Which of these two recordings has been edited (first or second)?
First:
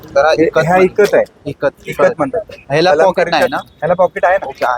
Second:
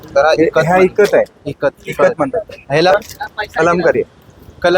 second